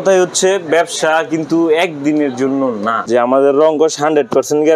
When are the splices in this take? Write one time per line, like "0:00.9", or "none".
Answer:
0:03.0